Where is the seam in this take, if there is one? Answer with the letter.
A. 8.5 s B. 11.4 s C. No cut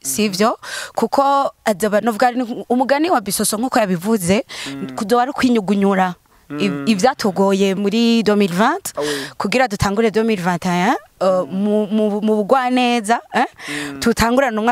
C